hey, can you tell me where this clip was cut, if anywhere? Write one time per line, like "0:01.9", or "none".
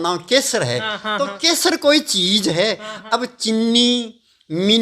none